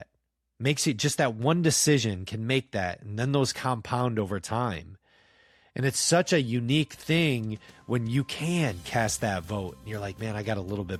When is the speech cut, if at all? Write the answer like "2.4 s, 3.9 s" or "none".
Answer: none